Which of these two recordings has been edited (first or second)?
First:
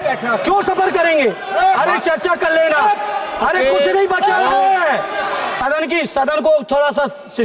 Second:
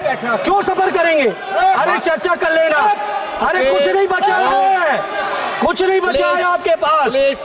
first